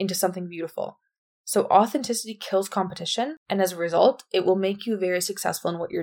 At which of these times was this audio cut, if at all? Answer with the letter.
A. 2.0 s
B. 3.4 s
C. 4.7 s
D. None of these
B